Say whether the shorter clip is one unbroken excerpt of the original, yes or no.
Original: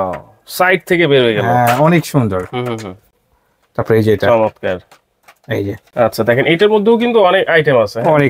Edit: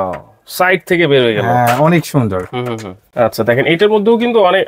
no